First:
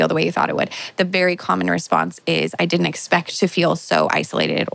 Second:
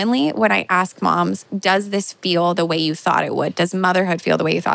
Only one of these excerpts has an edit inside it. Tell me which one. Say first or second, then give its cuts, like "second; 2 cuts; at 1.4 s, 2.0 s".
second; 1 cut; at 1.5 s